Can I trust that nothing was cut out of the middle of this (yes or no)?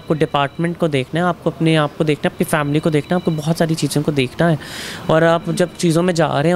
yes